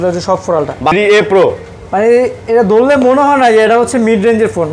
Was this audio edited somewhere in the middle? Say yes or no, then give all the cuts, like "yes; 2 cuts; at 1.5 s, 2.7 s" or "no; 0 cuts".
yes; 1 cut; at 0.9 s